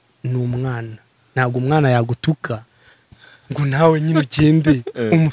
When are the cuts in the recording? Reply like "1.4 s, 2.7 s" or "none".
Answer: none